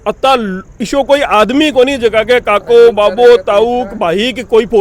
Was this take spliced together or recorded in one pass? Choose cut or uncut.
uncut